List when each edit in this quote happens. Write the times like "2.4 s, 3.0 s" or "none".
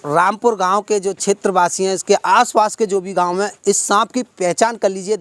none

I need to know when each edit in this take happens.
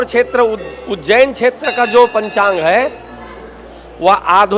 none

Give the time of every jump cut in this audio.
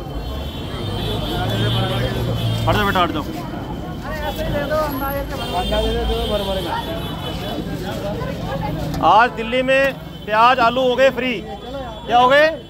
none

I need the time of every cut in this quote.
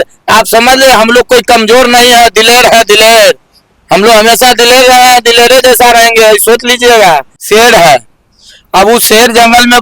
7.3 s

